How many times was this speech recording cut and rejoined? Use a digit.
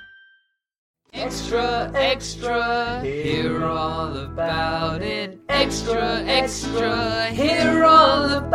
1